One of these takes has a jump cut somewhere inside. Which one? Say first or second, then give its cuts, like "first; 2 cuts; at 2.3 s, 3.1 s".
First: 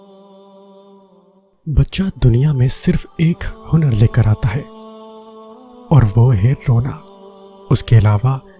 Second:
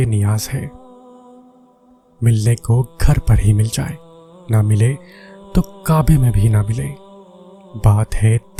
first; 1 cut; at 1.1 s